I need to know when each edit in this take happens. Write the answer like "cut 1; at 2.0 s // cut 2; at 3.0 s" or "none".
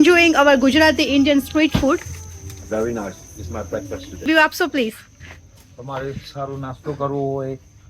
cut 1; at 4.3 s